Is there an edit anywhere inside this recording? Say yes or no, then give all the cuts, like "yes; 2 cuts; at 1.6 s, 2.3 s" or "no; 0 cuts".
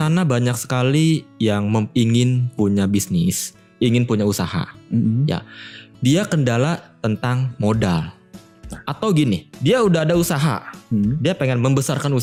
no; 0 cuts